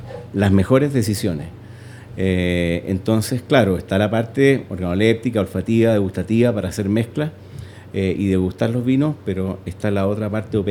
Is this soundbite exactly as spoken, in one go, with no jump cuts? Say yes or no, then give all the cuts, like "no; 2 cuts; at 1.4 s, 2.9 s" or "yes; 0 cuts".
yes; 0 cuts